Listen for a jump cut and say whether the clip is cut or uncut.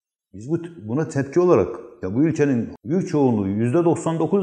cut